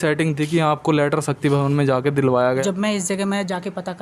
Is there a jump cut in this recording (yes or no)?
yes